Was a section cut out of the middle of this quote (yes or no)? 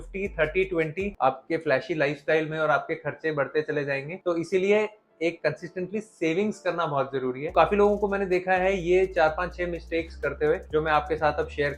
yes